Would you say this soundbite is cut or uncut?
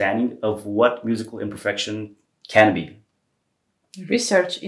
uncut